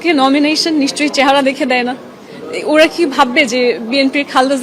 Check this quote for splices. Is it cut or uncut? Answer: uncut